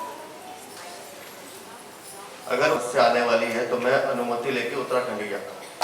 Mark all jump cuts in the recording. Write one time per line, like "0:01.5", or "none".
0:02.8